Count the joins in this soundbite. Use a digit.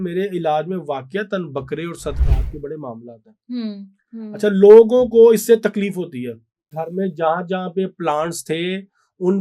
1